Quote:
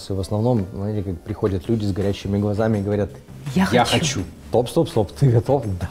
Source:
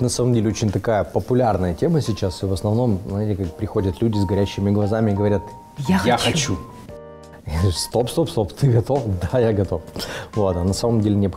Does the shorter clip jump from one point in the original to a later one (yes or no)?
yes